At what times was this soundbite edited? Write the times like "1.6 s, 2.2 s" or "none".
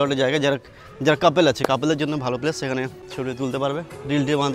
3.0 s